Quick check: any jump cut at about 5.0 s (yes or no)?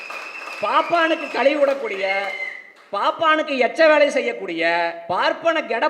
yes